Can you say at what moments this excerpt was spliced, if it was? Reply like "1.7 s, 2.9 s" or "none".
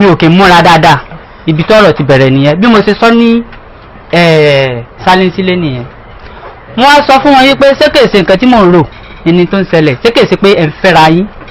none